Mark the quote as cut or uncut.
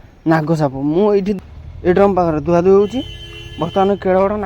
cut